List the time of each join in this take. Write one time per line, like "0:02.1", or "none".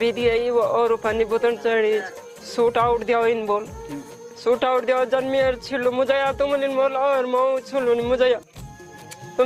none